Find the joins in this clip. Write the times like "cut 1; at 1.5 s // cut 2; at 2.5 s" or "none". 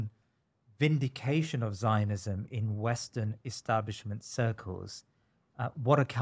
none